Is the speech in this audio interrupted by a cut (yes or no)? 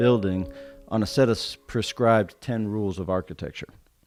no